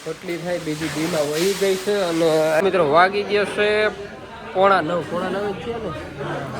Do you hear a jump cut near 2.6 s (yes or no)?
yes